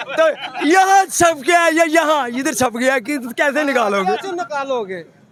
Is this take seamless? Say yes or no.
yes